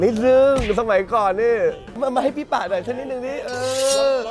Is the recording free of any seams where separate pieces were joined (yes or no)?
no